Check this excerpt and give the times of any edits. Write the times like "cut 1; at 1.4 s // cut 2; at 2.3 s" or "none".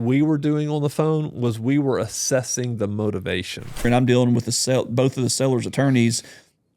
cut 1; at 3.8 s